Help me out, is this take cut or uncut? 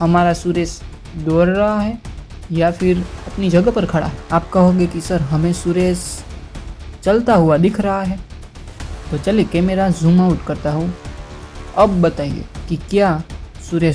uncut